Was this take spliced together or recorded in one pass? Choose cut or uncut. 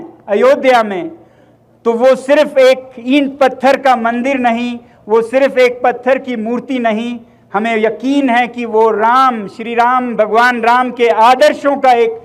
uncut